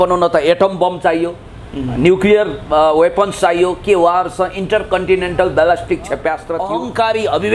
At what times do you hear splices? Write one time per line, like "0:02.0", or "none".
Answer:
0:06.5